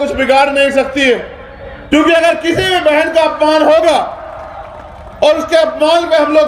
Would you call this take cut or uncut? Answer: cut